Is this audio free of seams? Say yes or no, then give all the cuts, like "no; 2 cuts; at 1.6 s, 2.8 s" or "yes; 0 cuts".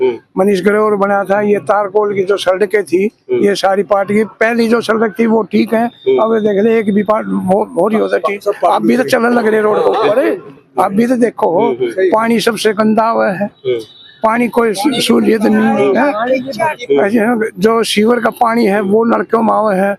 yes; 0 cuts